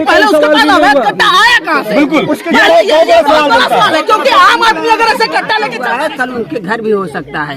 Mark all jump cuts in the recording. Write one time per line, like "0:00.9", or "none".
0:05.8